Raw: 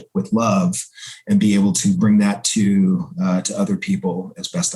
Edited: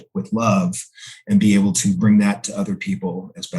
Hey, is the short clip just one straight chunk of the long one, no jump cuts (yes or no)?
no